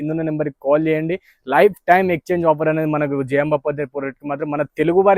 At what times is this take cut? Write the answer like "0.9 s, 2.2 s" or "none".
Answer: none

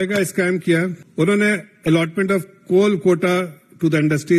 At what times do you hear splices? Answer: 1.0 s

